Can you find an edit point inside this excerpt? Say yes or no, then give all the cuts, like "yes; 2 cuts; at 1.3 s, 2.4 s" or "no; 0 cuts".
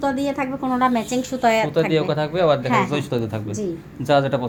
no; 0 cuts